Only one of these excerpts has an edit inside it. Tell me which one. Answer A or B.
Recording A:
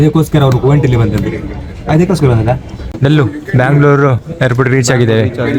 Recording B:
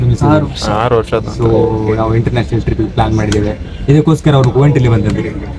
A